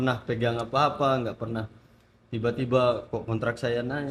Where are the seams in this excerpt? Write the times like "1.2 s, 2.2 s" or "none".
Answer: none